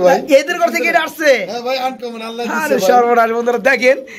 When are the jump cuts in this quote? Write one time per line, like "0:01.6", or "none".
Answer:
none